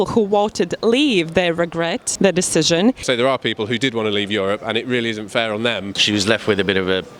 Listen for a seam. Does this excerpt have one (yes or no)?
yes